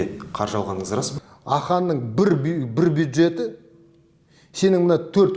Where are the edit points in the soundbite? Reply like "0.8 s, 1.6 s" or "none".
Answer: 1.1 s